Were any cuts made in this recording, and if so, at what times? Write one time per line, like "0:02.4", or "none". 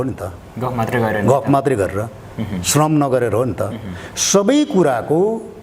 none